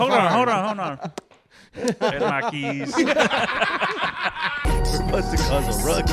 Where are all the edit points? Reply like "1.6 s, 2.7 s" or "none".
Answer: 4.6 s